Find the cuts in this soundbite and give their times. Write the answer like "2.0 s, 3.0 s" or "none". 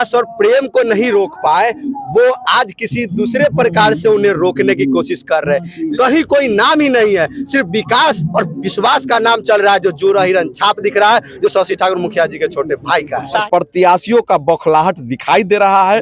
5.8 s, 13.4 s